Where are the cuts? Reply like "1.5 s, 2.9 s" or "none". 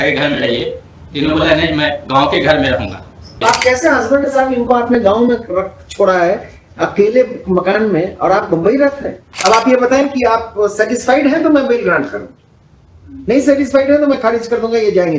3.4 s, 9.2 s